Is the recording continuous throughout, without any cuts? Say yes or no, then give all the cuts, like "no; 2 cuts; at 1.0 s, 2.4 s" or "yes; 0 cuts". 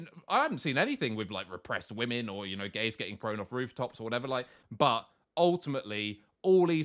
no; 1 cut; at 4.6 s